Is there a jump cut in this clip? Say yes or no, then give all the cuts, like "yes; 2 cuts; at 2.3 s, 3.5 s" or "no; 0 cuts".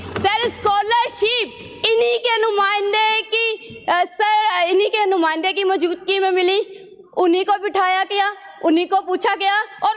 no; 0 cuts